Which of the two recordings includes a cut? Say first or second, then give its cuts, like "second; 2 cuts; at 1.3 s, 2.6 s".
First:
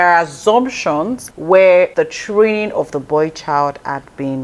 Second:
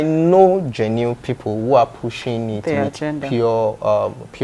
first; 2 cuts; at 1.2 s, 1.9 s